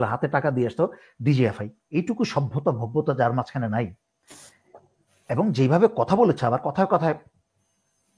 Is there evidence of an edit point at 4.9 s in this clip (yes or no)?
no